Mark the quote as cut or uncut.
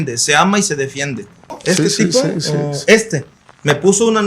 cut